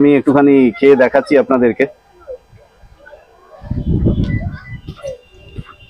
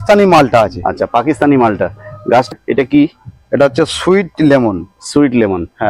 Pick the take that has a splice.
second; 1 cut; at 2.5 s

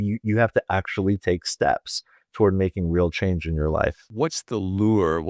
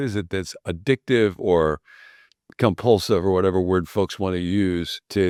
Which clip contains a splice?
first; 1 cut; at 4.1 s

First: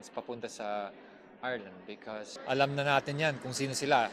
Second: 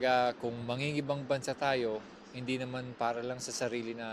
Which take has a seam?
first; 1 cut; at 2.3 s

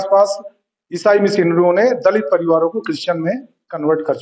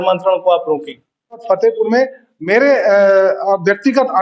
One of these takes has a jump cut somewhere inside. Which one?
second; 1 cut; at 1.4 s

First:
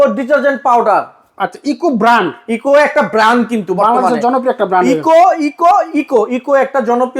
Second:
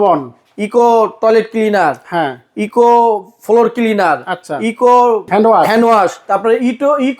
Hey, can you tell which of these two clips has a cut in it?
second; 2 cuts; at 5.3 s, 6.2 s

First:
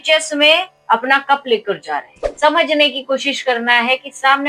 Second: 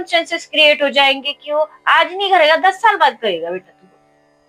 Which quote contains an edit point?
first; 1 cut; at 2.2 s

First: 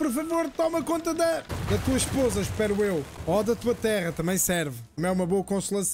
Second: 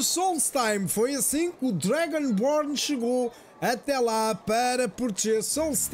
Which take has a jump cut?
first; 3 cuts; at 1.5 s, 3.1 s, 4.8 s

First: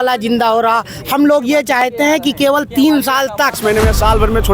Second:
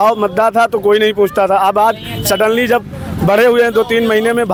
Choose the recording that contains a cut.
first; 1 cut; at 3.6 s

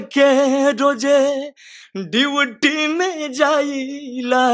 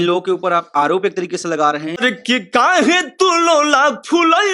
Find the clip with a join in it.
second; 1 cut; at 2.0 s

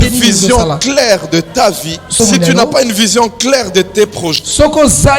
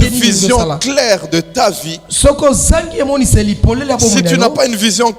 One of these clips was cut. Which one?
first; 1 cut; at 2.2 s

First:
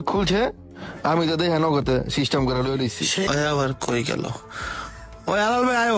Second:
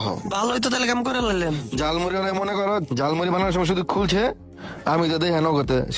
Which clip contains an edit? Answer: first; 1 cut; at 3.3 s

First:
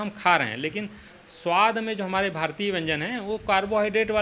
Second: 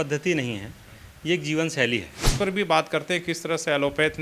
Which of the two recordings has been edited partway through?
second; 1 cut; at 2.2 s

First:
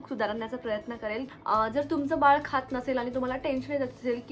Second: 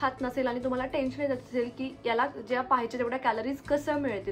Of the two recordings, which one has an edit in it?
first; 1 cut; at 1.3 s

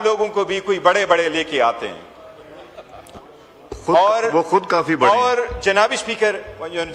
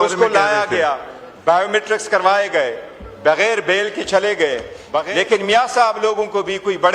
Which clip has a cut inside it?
second; 1 cut; at 5.1 s

